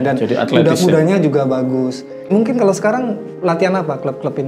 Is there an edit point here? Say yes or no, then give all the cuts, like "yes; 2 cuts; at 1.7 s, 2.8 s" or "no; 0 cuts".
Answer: yes; 1 cut; at 2.3 s